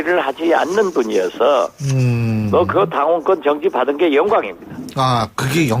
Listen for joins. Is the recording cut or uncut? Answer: uncut